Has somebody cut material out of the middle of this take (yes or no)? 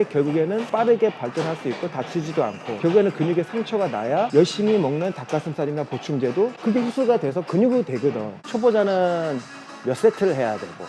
yes